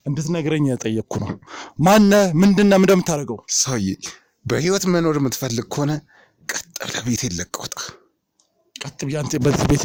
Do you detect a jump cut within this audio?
no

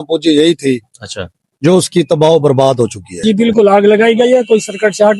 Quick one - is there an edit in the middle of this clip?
yes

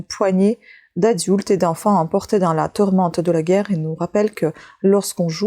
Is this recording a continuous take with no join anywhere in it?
yes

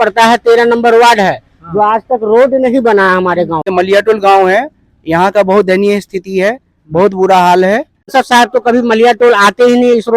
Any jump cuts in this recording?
yes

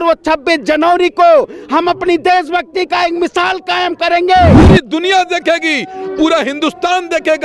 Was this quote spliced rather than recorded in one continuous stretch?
yes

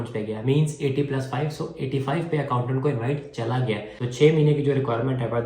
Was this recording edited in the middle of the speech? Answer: yes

